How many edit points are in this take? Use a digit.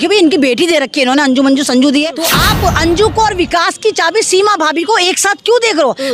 1